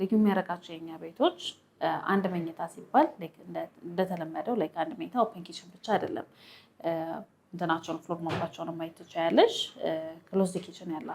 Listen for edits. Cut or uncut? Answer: uncut